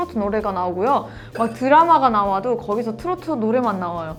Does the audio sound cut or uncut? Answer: uncut